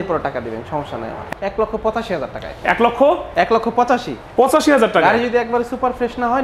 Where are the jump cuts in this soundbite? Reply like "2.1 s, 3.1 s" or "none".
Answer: 1.2 s